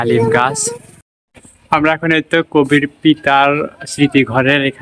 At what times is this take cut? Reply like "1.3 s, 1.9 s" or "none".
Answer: 1.5 s